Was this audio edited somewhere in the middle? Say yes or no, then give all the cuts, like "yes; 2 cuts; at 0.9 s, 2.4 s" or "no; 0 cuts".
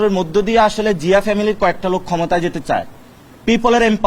no; 0 cuts